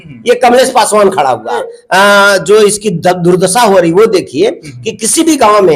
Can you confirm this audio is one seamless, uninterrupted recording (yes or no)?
no